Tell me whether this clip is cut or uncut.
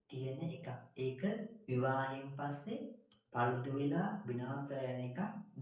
uncut